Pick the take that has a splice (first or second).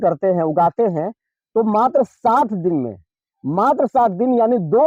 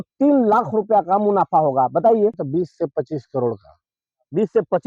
second